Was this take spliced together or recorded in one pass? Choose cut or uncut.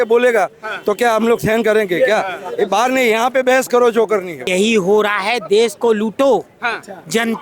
cut